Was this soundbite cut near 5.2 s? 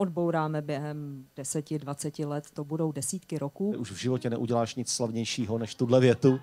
no; 1 cut; at 3.8 s

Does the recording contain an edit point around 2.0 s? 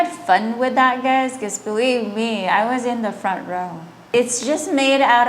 no; 1 cut; at 4.1 s

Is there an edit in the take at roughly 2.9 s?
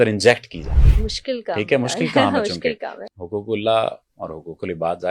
yes; 1 cut; at 2.9 s

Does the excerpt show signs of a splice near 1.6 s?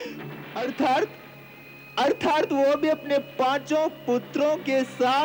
no; 0 cuts

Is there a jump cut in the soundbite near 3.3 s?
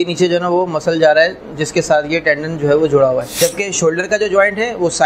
yes; 1 cut; at 3.3 s

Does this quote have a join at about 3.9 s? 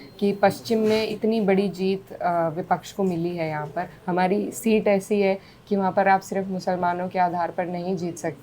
yes; 2 cuts; at 1.1 s, 3.9 s

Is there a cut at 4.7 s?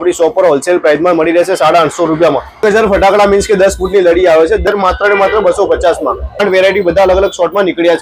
yes; 3 cuts; at 2.6 s, 4.7 s, 6.4 s

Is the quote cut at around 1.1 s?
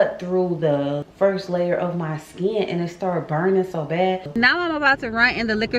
yes; 2 cuts; at 1.1 s, 4.3 s

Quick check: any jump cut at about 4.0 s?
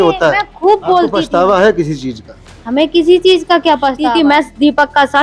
yes; 2 cuts; at 1.2 s, 4.0 s

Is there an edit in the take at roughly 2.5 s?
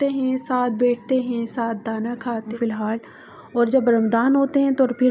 yes; 1 cut; at 2.5 s

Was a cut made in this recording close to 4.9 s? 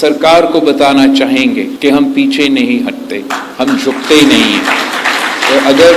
no; 0 cuts

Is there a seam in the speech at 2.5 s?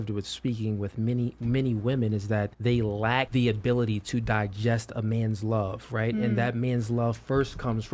yes; 2 cuts; at 2.5 s, 3.3 s

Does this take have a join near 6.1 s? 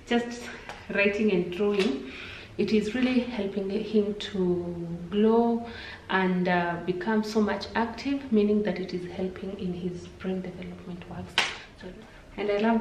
no; 1 cut; at 11.6 s

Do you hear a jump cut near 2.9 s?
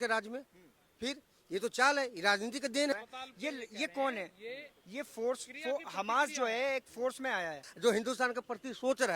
yes; 2 cuts; at 2.9 s, 7.6 s

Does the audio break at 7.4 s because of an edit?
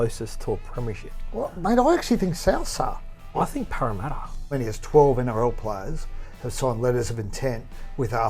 no; 2 cuts; at 3.3 s, 4.3 s

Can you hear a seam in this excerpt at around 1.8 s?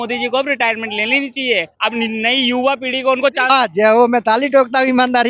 no; 1 cut; at 3.5 s

